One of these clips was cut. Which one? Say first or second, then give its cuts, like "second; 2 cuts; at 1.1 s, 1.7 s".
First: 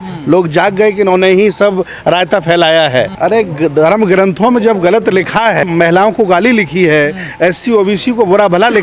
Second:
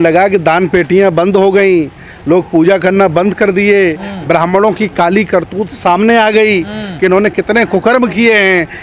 first; 2 cuts; at 3.1 s, 5.7 s